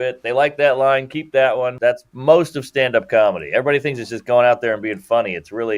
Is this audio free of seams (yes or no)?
no